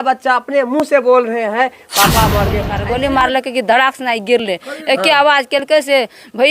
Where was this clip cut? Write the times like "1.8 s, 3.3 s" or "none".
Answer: 2.7 s